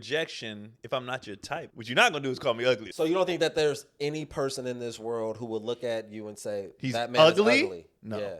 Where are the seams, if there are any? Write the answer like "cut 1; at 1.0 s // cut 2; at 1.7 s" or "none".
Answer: cut 1; at 1.7 s // cut 2; at 2.9 s